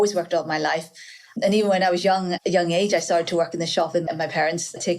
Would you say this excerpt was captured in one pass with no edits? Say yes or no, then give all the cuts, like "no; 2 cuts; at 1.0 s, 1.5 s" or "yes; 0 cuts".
no; 1 cut; at 4.0 s